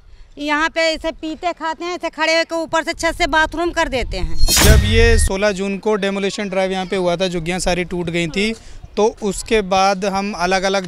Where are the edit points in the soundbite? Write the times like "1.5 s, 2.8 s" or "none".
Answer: 4.6 s